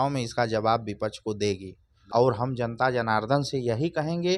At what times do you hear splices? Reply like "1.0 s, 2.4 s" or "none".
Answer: 2.0 s